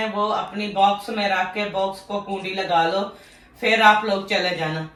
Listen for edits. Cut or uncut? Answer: uncut